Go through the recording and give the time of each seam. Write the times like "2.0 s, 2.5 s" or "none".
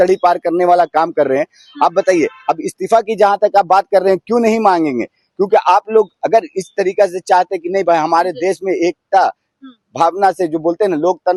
none

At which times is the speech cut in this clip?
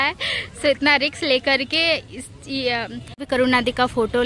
3.1 s

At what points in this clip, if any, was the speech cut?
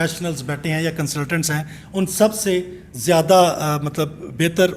none

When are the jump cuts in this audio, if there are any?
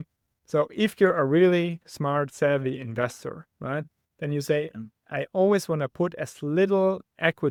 none

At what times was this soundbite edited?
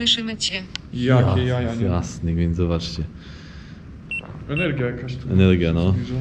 none

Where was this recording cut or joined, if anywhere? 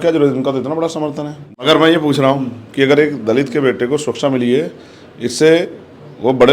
1.3 s

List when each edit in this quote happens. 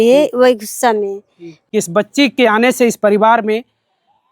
1.5 s

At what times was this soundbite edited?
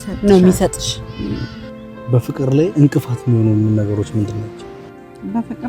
1.5 s

